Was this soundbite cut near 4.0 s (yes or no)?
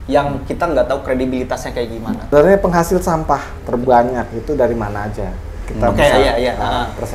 no